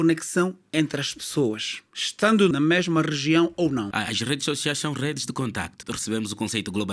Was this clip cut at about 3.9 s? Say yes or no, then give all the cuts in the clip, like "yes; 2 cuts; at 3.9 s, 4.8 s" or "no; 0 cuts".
yes; 3 cuts; at 2.5 s, 3.9 s, 5.9 s